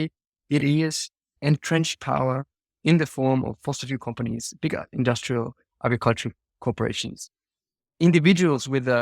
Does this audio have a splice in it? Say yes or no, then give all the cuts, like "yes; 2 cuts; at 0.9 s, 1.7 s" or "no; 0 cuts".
yes; 1 cut; at 1.3 s